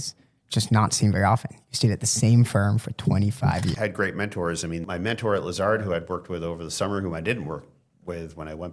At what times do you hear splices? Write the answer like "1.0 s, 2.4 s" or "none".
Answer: 3.8 s